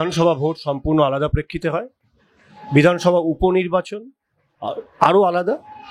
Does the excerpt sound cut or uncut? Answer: uncut